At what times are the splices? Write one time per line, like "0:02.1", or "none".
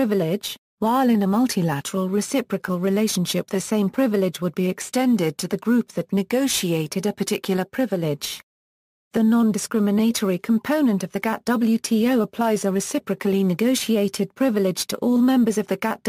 0:01.6